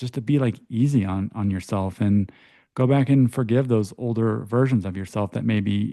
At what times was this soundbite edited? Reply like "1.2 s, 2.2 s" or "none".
none